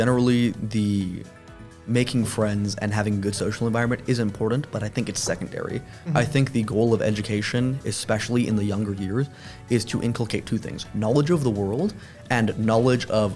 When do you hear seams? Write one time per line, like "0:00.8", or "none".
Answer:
none